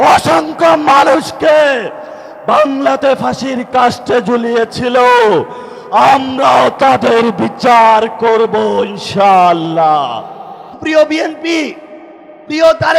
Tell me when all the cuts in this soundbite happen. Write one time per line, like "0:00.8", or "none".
0:10.7